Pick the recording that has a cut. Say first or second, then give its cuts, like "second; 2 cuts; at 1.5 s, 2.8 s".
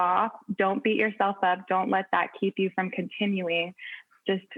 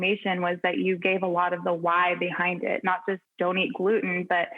second; 1 cut; at 3.3 s